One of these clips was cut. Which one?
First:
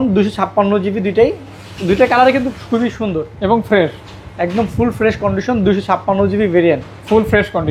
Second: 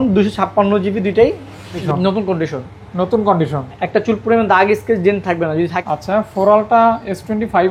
second; 2 cuts; at 1.8 s, 5.8 s

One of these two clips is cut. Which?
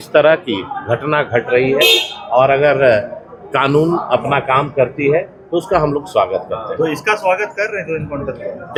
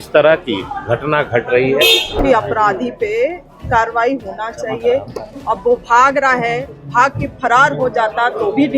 second; 1 cut; at 2.2 s

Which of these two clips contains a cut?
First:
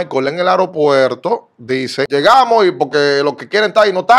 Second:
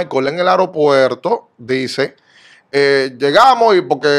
first; 1 cut; at 2.1 s

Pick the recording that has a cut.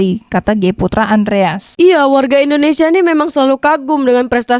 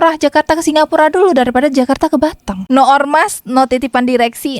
second; 1 cut; at 2.6 s

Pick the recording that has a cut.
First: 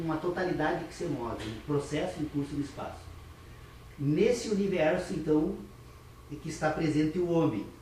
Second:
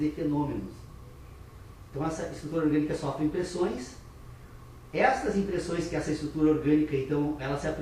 first; 1 cut; at 3.8 s

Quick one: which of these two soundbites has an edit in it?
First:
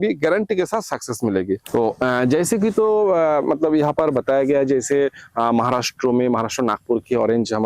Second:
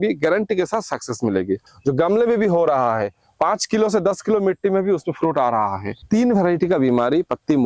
second; 2 cuts; at 1.6 s, 6.0 s

